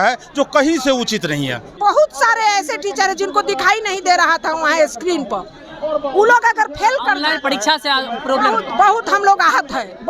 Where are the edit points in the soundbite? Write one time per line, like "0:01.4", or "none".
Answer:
0:01.7